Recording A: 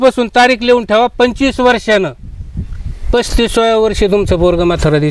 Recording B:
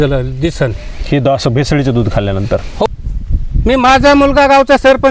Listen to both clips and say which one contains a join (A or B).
B